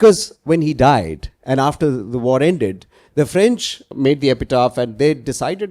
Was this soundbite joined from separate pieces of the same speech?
yes; 1 cut; at 3.8 s

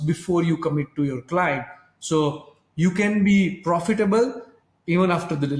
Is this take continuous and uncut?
yes; 0 cuts

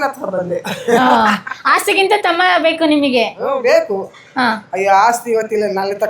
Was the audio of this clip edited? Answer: no; 0 cuts

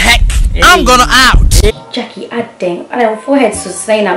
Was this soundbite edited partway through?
yes; 1 cut; at 1.7 s

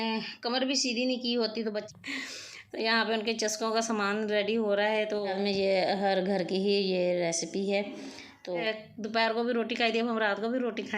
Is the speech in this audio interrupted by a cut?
yes; 3 cuts; at 1.9 s, 5.3 s, 8.6 s

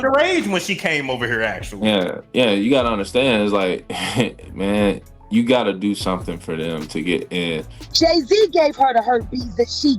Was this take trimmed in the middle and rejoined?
yes; 1 cut; at 7.8 s

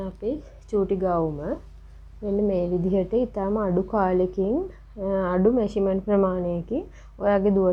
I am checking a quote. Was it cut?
no; 0 cuts

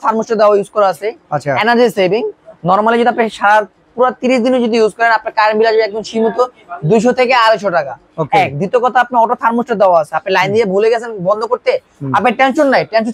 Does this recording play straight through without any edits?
yes; 0 cuts

